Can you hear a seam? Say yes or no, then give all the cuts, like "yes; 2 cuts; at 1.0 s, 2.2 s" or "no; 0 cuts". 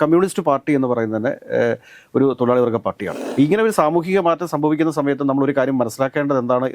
yes; 1 cut; at 3.1 s